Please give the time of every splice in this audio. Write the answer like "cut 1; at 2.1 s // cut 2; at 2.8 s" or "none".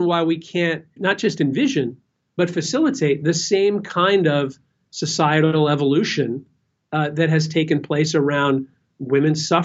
cut 1; at 0.9 s